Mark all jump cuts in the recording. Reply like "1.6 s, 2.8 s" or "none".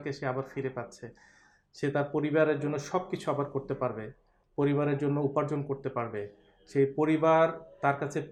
none